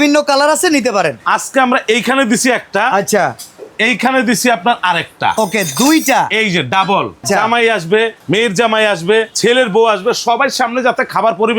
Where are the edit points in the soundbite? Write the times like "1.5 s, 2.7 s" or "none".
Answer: 1.2 s, 7.2 s, 8.2 s, 9.3 s